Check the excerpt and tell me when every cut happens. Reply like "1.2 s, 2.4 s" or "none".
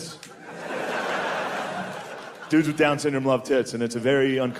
none